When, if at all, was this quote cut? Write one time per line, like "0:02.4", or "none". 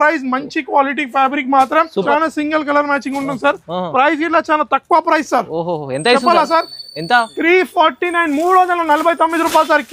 0:02.1